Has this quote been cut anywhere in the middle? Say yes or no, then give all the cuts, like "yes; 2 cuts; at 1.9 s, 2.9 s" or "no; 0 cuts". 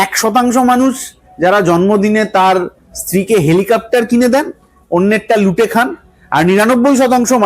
no; 0 cuts